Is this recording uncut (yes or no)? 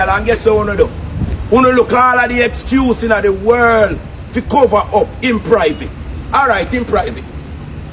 yes